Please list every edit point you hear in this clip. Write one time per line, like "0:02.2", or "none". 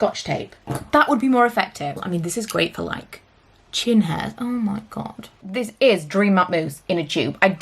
0:02.0
0:05.4